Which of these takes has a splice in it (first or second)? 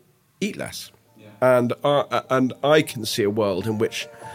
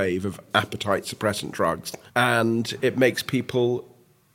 second